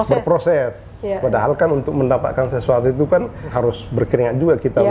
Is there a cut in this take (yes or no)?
yes